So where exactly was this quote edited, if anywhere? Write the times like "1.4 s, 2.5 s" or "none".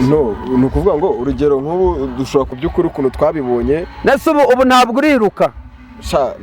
2.5 s